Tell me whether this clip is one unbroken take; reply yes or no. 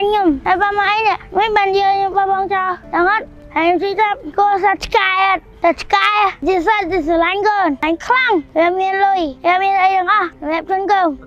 yes